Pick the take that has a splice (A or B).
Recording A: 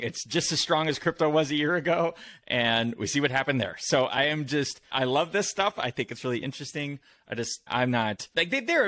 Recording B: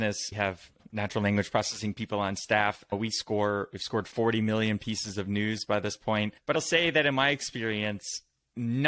B